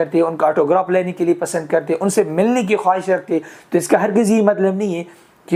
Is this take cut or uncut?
uncut